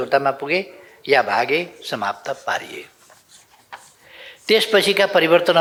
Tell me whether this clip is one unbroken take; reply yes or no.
yes